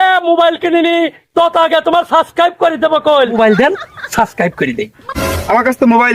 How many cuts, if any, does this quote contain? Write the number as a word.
two